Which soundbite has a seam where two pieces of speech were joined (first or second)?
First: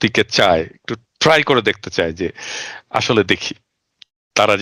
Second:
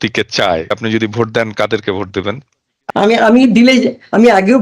second